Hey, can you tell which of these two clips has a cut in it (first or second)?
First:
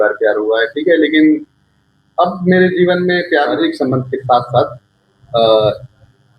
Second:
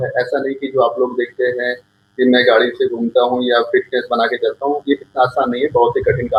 first